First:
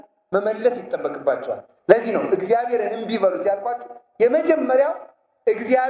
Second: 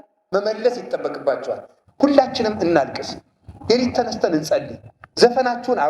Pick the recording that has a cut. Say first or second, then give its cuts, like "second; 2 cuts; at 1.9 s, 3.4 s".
second; 1 cut; at 1.7 s